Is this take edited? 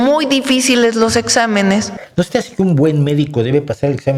yes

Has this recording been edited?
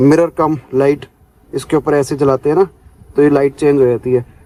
no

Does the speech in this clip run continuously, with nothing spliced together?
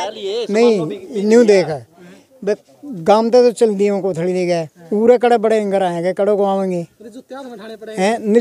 yes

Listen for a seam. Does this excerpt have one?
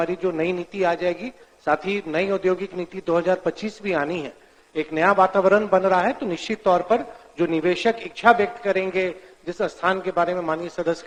no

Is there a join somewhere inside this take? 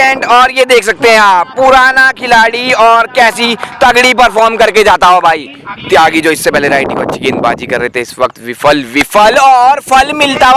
yes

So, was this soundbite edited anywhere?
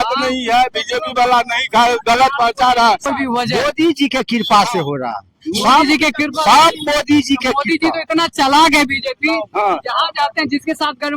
yes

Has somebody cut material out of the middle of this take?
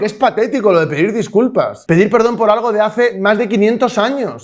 yes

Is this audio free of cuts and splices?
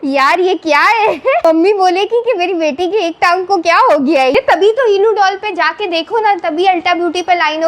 no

